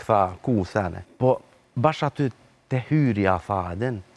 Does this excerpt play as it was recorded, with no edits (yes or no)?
no